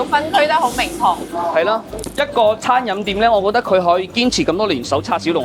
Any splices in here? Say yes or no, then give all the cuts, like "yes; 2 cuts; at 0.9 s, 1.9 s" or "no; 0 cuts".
yes; 1 cut; at 1.9 s